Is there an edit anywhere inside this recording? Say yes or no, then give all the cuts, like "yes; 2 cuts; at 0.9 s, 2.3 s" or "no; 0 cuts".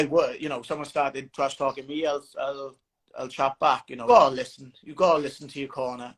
yes; 1 cut; at 3.9 s